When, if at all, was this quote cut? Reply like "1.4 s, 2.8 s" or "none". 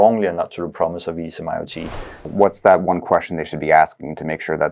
2.3 s